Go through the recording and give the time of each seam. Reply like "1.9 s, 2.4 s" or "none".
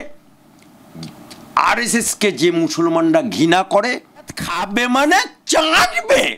4.5 s